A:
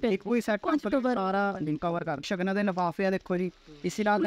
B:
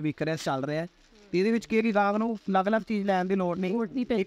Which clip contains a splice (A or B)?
A